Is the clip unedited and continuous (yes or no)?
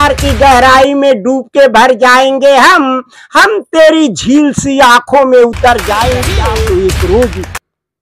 no